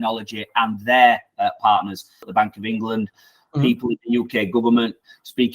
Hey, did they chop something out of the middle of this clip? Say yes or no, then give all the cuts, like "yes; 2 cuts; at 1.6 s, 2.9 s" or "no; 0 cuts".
yes; 1 cut; at 2.1 s